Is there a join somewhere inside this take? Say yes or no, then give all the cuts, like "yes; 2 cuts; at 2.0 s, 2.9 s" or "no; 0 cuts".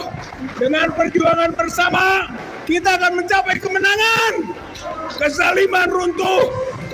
no; 0 cuts